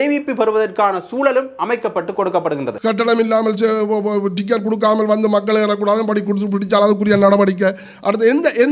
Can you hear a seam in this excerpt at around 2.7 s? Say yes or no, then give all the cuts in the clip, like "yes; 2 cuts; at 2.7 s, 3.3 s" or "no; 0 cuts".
yes; 1 cut; at 2.7 s